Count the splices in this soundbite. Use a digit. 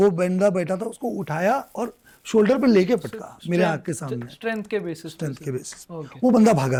0